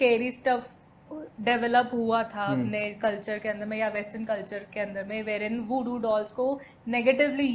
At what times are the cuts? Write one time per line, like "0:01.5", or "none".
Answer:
none